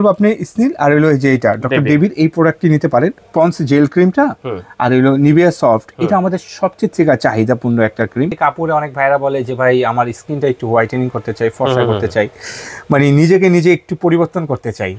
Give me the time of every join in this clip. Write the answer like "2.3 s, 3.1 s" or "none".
3.2 s, 8.4 s